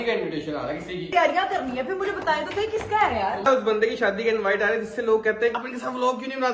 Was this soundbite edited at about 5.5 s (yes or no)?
yes